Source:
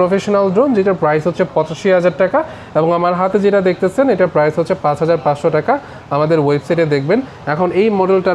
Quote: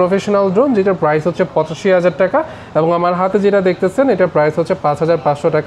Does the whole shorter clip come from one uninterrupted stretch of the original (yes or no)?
yes